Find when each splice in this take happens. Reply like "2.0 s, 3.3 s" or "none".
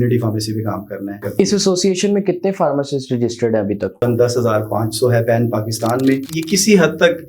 1.2 s, 4.0 s, 6.3 s